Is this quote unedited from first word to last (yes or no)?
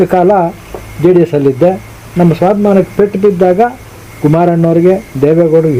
yes